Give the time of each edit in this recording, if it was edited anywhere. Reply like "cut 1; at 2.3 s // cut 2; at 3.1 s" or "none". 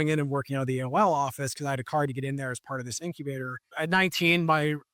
cut 1; at 3.7 s